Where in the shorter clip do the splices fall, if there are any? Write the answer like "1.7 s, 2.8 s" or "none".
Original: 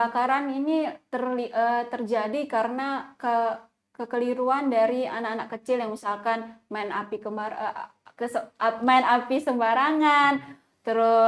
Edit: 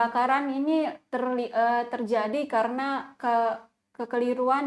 none

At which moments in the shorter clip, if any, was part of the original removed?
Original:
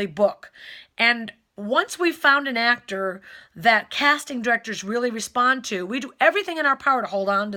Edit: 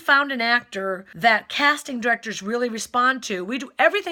1.1 s

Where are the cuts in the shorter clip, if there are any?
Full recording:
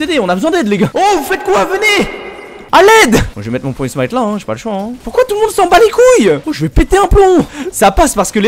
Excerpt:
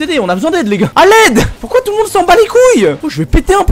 0.9 s, 1.6 s

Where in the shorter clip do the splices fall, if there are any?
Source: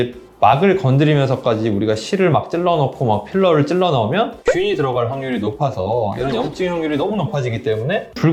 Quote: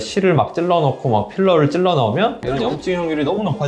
2.4 s

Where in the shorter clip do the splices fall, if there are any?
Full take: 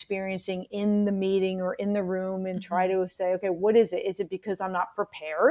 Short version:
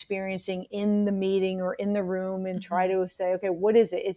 none

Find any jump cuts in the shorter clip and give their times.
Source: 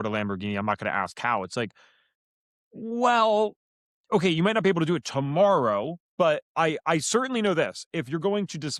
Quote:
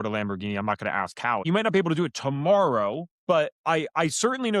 1.5 s

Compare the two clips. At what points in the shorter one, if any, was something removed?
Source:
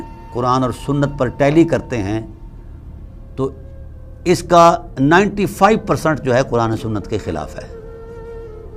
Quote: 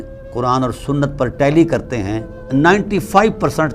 2.4 s

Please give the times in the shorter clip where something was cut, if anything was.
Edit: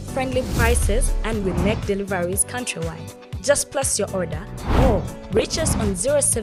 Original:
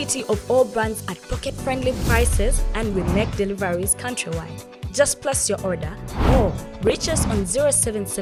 none

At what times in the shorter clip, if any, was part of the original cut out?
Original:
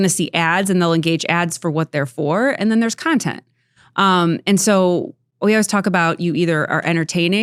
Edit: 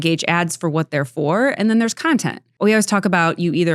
2.4 s

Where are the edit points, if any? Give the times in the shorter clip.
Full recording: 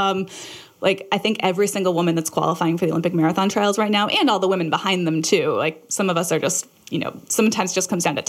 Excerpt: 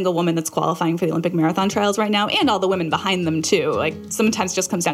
4.0 s

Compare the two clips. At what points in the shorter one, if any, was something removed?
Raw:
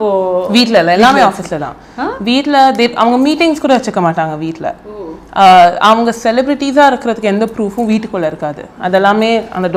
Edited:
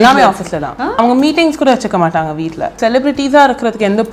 0.9 s, 2.8 s

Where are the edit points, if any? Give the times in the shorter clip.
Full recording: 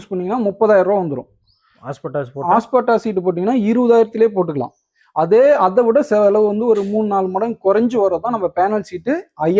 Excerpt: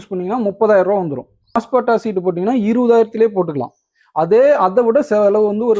1.6 s

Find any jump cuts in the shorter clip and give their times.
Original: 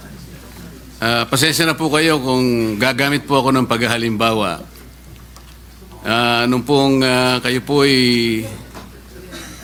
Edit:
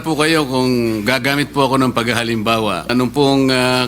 2.9 s

